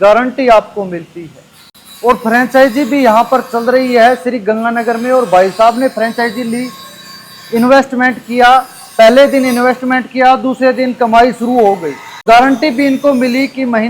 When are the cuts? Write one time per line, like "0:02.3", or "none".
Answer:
0:12.2